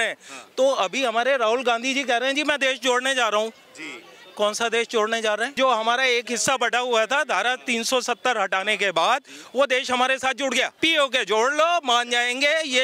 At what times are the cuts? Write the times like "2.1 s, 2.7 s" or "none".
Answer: 5.5 s, 10.7 s